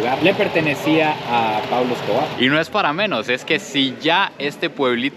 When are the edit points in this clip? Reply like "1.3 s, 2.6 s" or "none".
2.3 s